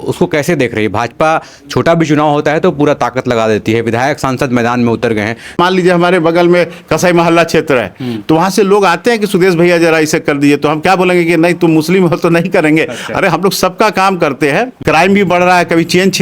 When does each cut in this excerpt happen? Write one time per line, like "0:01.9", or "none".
0:05.6
0:14.7